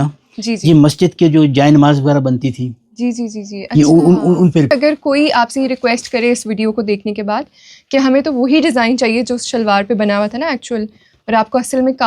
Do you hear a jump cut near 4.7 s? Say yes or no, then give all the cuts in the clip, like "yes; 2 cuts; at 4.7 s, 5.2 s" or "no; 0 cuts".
yes; 1 cut; at 4.7 s